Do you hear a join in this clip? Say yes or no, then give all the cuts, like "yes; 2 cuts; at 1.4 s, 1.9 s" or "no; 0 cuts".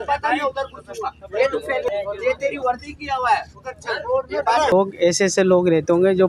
yes; 2 cuts; at 1.9 s, 4.7 s